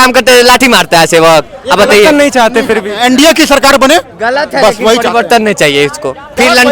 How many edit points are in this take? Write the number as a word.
one